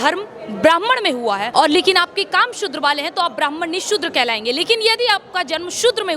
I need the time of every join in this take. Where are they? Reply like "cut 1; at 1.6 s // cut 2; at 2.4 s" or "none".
cut 1; at 1.5 s